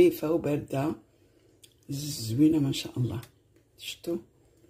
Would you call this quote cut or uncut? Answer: uncut